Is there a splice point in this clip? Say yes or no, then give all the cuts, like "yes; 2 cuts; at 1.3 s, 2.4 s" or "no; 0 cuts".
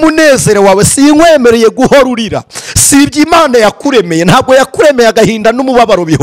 no; 0 cuts